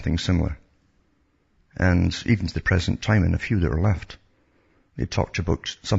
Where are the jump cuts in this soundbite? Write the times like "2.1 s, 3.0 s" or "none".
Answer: 3.6 s